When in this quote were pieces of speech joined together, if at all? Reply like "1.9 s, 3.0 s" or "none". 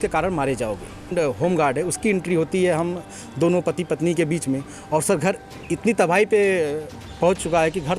1.0 s